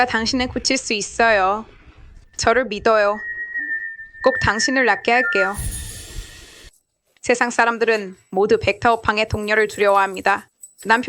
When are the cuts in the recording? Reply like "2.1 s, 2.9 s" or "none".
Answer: 6.7 s